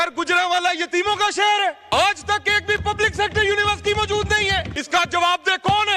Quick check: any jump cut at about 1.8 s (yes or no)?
yes